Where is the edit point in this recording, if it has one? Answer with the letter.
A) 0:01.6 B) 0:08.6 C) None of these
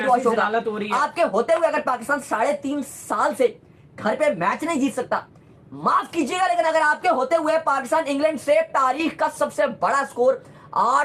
C